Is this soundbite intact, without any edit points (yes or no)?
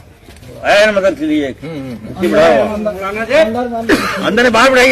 yes